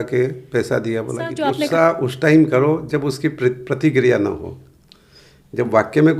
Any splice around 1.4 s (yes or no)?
yes